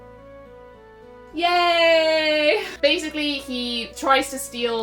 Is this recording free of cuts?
no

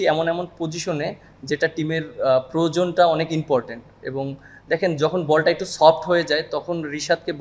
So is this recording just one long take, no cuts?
yes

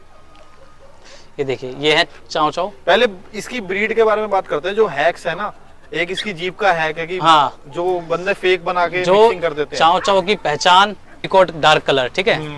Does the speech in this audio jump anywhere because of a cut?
yes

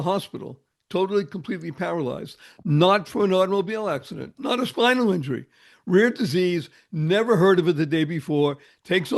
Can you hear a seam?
no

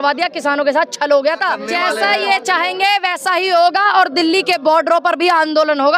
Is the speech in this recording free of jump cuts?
no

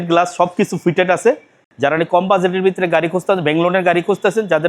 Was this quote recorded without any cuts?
no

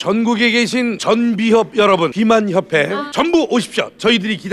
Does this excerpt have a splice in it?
yes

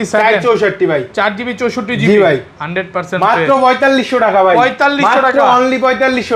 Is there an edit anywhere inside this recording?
no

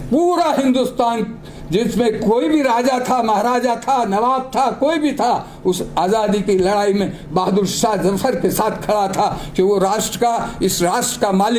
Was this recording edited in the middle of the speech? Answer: no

